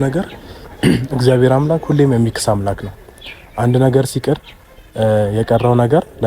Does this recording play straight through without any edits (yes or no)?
yes